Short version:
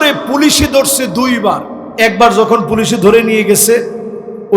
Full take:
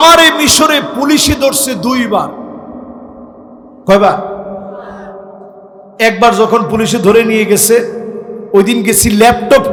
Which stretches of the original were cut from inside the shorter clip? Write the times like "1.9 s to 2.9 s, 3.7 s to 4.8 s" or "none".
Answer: 2.5 s to 5.8 s